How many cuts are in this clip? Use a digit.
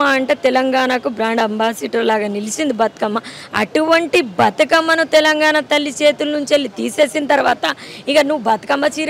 0